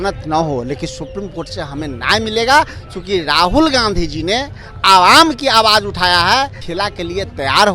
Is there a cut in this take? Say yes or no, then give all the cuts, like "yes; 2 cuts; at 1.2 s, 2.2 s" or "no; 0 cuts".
yes; 1 cut; at 6.6 s